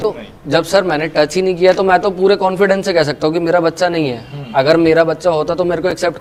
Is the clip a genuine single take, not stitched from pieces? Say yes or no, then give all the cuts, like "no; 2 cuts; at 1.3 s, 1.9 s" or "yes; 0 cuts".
yes; 0 cuts